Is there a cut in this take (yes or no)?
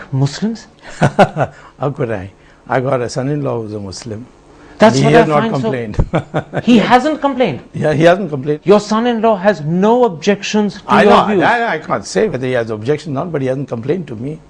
yes